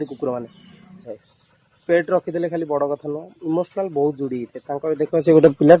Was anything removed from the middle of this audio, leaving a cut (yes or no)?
yes